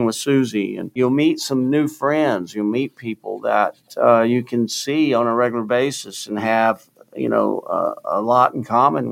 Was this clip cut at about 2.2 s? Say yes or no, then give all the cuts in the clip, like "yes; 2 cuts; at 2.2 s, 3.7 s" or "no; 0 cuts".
no; 2 cuts; at 0.9 s, 3.9 s